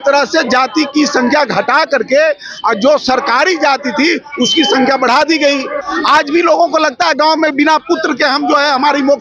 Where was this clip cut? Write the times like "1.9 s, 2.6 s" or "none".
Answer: 5.8 s